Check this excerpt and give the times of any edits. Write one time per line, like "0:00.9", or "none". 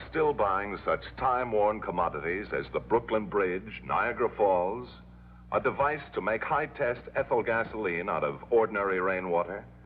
0:03.8